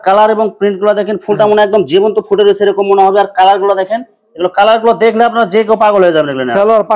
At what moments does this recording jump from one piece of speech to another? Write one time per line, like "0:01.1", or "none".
none